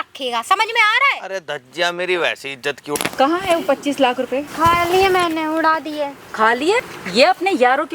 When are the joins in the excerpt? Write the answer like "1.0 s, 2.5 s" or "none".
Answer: 2.8 s, 4.5 s, 6.9 s